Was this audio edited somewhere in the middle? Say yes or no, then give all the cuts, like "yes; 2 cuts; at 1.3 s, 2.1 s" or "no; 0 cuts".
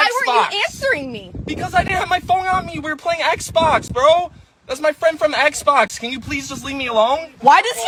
no; 0 cuts